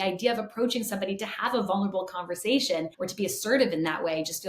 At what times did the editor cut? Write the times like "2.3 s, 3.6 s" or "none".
3.0 s